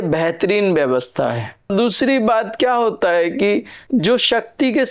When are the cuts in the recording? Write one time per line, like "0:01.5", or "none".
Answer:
0:01.7